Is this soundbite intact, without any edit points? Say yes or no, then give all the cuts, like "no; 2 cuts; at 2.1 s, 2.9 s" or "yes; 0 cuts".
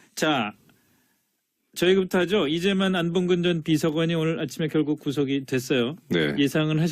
no; 1 cut; at 1.1 s